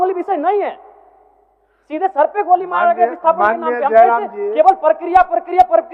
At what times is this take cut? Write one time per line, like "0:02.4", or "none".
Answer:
none